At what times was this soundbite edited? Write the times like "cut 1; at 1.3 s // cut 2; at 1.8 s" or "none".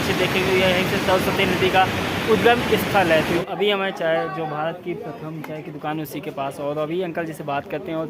cut 1; at 3.4 s